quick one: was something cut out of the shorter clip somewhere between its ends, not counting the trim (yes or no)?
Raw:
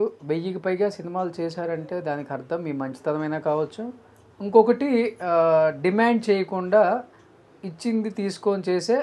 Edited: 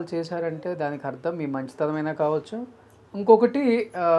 no